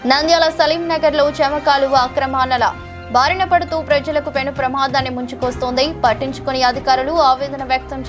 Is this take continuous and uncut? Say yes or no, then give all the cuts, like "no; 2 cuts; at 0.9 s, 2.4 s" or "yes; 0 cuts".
yes; 0 cuts